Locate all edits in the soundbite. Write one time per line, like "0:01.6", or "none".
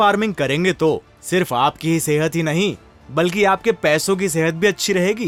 none